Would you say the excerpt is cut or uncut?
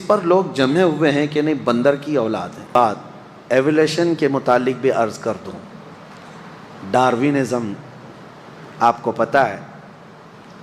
cut